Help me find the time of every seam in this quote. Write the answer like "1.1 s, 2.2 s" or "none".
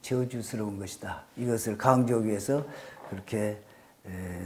none